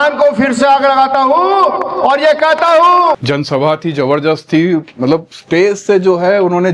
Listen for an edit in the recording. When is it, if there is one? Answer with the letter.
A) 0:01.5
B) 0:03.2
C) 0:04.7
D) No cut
B